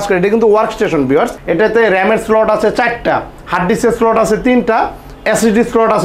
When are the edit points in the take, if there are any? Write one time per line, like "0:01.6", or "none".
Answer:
0:01.4